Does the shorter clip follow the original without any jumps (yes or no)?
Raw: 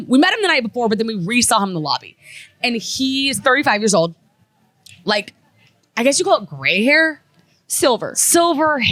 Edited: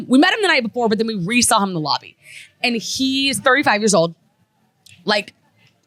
yes